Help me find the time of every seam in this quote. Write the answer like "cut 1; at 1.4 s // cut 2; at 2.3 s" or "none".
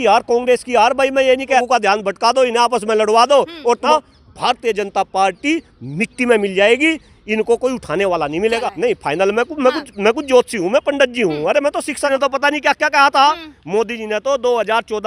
cut 1; at 1.6 s // cut 2; at 3.9 s // cut 3; at 8.7 s // cut 4; at 12.1 s